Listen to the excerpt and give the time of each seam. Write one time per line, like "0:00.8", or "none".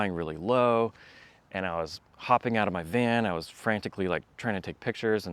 none